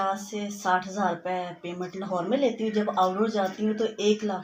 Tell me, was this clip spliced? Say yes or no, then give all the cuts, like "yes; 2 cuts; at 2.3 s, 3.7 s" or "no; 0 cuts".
no; 0 cuts